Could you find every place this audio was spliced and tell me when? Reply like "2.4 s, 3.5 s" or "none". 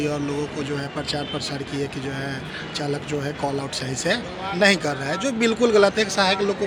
none